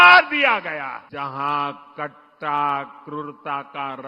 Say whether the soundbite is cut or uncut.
cut